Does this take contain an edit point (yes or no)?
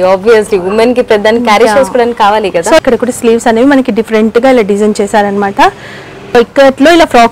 yes